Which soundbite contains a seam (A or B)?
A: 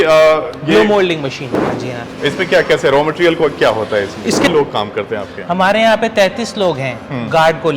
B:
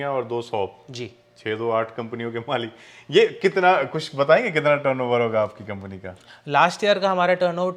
A